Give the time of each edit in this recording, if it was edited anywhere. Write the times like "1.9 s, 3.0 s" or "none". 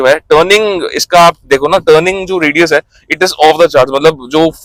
none